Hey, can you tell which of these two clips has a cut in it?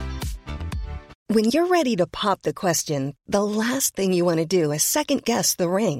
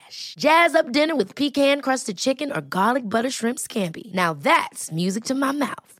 first; 1 cut; at 1.1 s

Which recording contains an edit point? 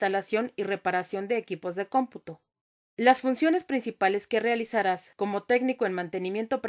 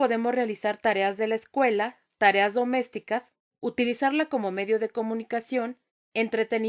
second; 1 cut; at 3.3 s

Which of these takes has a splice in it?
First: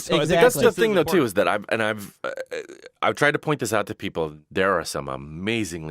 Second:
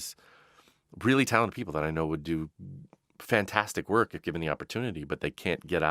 first; 1 cut; at 4.4 s

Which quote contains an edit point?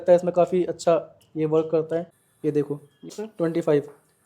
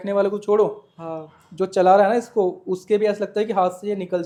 first; 2 cuts; at 2.2 s, 3.1 s

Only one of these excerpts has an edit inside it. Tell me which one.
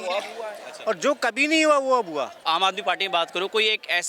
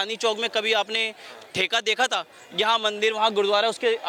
first; 1 cut; at 2.4 s

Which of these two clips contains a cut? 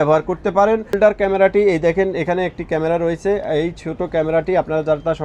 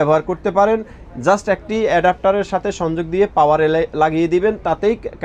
first; 1 cut; at 1.0 s

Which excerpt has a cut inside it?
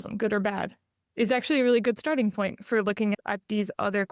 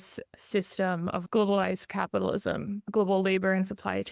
second; 2 cuts; at 1.2 s, 2.9 s

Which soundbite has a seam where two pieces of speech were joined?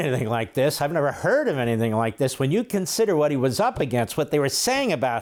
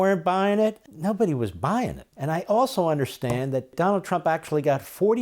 second; 3 cuts; at 0.9 s, 2.1 s, 3.7 s

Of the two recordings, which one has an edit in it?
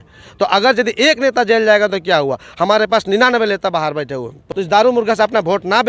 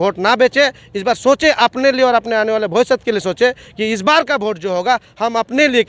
first; 1 cut; at 4.4 s

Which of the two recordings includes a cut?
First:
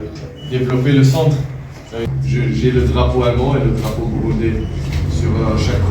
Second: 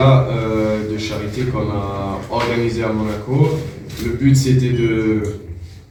first; 1 cut; at 2.1 s

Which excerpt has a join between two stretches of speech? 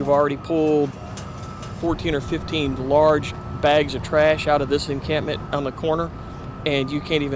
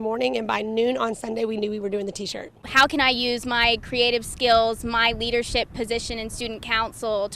second; 1 cut; at 2.6 s

